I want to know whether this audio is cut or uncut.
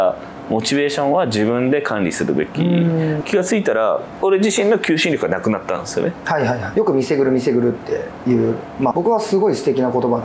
cut